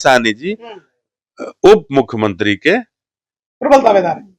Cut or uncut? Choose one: uncut